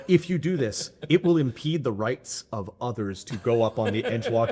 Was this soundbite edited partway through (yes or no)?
no